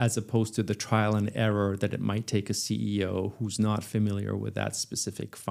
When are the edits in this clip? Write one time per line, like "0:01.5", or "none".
none